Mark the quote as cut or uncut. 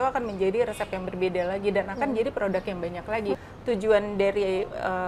cut